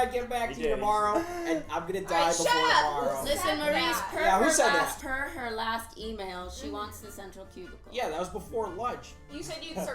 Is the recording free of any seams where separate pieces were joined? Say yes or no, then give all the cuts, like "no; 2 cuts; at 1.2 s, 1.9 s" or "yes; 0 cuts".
no; 1 cut; at 5.0 s